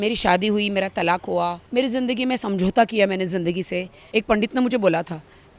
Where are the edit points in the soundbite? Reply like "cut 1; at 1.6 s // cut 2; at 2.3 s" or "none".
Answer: cut 1; at 1.6 s // cut 2; at 4.0 s